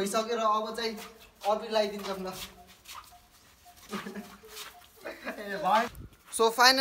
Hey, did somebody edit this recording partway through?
yes; 1 cut; at 5.9 s

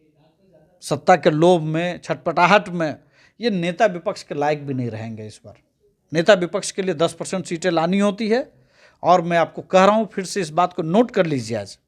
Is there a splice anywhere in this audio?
no; 0 cuts

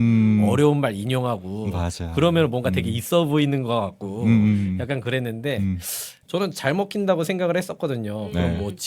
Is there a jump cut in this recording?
yes; 1 cut; at 6.2 s

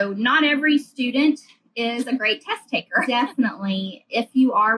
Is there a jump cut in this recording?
yes; 1 cut; at 3.0 s

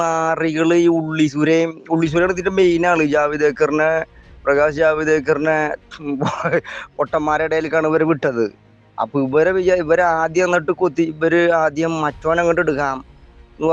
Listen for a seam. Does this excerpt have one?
no; 0 cuts

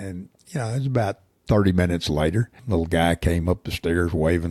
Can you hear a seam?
yes; 1 cut; at 2.6 s

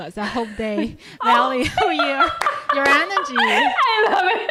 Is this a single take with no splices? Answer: yes; 0 cuts

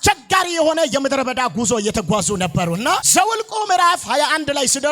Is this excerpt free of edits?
yes; 0 cuts

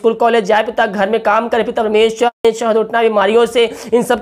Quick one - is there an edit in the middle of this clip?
yes; 1 cut; at 2.4 s

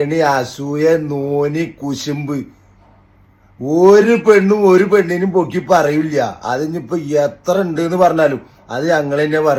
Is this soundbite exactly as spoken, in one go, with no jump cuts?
yes; 0 cuts

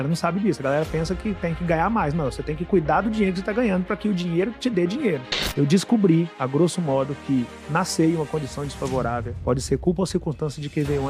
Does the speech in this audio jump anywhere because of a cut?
yes; 1 cut; at 5.3 s

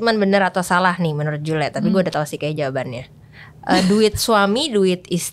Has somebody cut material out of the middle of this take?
no; 0 cuts

